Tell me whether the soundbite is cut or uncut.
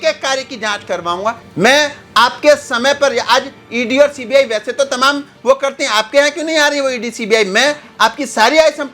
cut